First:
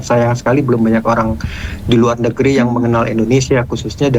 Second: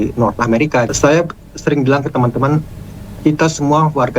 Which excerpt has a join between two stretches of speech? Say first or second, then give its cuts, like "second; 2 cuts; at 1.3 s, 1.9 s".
second; 1 cut; at 0.9 s